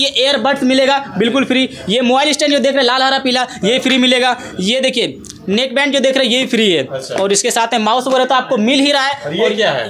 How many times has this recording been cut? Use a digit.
0